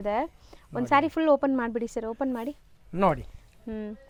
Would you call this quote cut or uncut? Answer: uncut